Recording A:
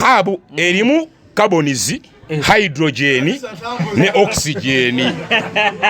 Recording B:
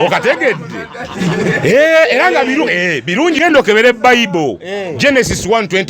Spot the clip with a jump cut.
B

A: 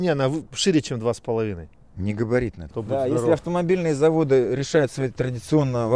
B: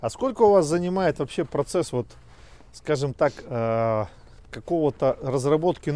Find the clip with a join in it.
A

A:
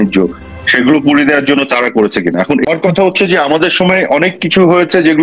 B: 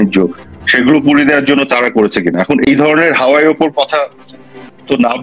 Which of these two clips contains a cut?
A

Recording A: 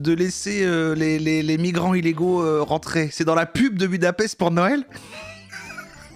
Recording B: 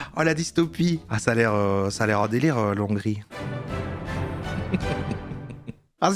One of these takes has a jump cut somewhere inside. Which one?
B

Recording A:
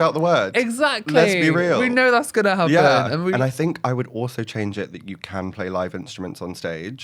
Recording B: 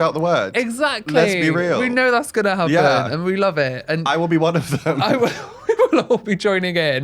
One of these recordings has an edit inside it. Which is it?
A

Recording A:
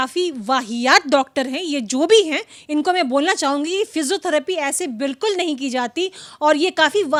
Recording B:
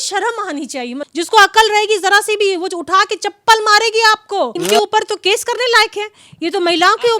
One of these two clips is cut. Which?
B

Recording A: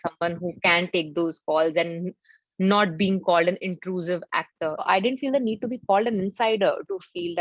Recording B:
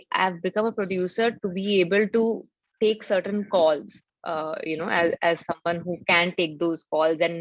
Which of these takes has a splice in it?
A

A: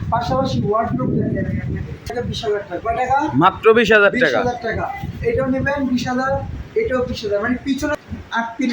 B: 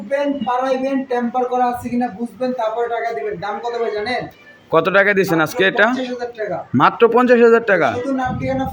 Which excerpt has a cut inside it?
A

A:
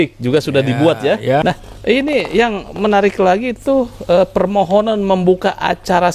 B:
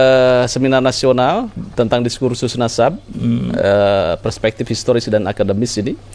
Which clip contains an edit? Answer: A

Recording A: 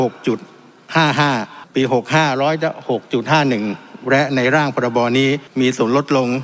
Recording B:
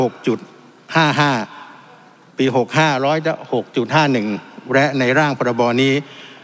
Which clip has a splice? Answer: A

